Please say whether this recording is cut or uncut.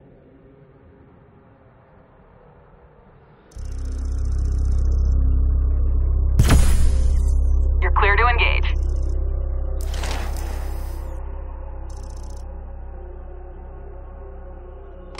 cut